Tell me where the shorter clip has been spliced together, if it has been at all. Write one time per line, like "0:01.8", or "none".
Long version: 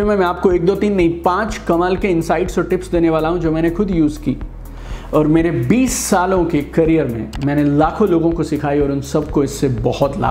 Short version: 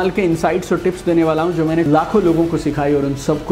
0:01.9